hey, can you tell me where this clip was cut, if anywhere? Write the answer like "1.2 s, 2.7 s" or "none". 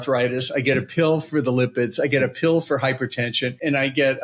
none